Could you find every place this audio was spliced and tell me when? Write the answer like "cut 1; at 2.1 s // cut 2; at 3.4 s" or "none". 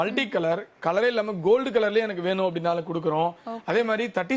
none